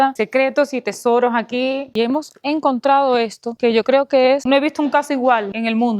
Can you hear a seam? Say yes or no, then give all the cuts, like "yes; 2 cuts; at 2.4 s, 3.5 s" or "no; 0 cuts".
yes; 2 cuts; at 1.9 s, 4.4 s